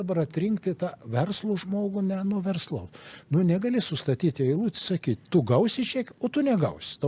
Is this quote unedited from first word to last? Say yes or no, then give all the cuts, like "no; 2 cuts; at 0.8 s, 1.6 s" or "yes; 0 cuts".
yes; 0 cuts